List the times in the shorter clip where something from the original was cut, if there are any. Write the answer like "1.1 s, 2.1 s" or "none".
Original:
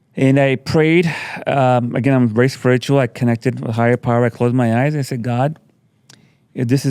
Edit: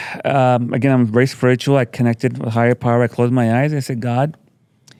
none